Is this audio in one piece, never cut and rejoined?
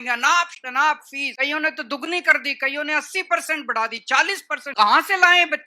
no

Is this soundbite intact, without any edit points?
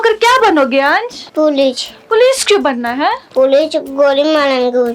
no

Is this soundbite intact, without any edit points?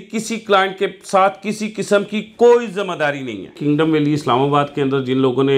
no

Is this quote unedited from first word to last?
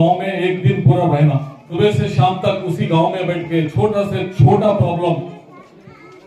no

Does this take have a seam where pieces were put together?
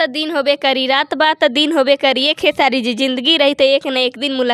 no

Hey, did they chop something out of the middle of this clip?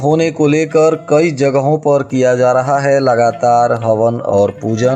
no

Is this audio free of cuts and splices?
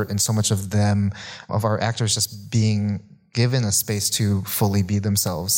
no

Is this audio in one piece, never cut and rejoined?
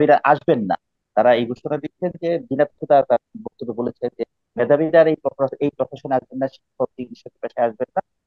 yes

